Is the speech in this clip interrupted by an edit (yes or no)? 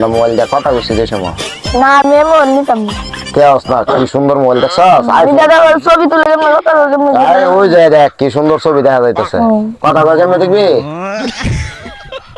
yes